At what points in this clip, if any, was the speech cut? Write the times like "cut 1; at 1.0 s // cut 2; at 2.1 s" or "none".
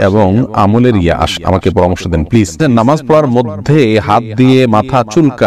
cut 1; at 1.4 s // cut 2; at 2.6 s